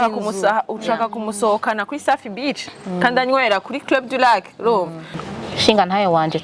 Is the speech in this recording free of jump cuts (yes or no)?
no